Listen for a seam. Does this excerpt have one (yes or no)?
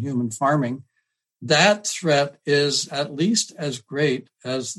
yes